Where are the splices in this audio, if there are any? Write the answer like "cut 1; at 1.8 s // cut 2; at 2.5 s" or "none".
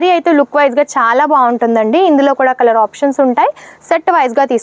none